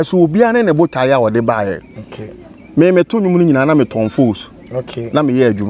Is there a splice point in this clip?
no; 0 cuts

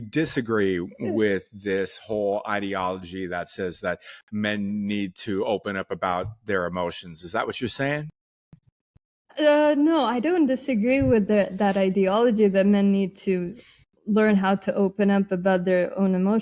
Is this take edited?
no; 0 cuts

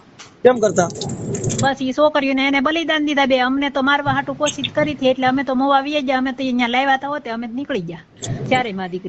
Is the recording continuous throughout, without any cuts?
yes; 0 cuts

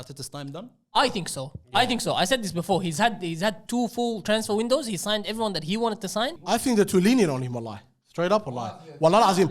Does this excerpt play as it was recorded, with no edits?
no; 1 cut; at 6.4 s

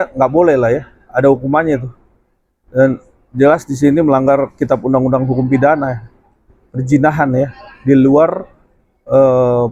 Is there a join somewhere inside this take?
no; 0 cuts

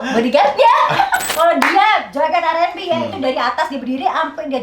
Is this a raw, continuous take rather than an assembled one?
no; 1 cut; at 1.2 s

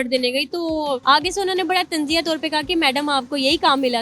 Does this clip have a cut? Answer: yes; 1 cut; at 1.0 s

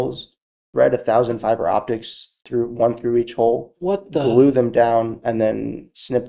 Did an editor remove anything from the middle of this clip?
no; 0 cuts

